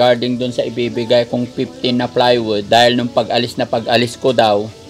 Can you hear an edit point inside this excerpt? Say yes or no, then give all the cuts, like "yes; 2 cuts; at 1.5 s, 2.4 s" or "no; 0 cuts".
yes; 1 cut; at 2.6 s